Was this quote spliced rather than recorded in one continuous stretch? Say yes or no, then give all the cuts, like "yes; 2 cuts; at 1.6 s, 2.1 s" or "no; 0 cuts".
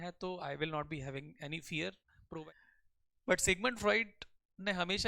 yes; 1 cut; at 2.4 s